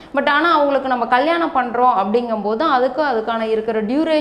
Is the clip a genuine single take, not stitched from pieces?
yes; 0 cuts

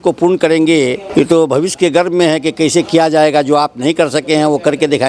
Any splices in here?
yes; 1 cut; at 1.0 s

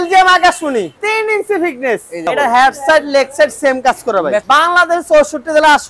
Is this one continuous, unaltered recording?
no; 3 cuts; at 0.9 s, 2.2 s, 4.4 s

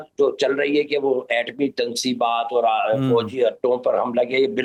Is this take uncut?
yes; 0 cuts

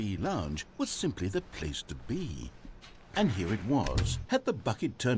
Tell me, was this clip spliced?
yes; 1 cut; at 2.9 s

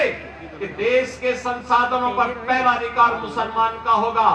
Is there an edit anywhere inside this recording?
no; 0 cuts

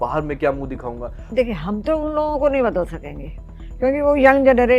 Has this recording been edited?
yes; 1 cut; at 1.3 s

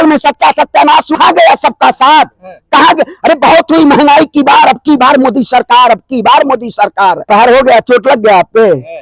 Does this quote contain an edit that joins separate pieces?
yes; 2 cuts; at 1.2 s, 7.2 s

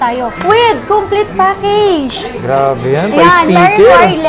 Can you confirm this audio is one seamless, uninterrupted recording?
yes; 0 cuts

